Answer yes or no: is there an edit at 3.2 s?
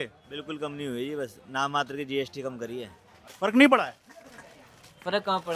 yes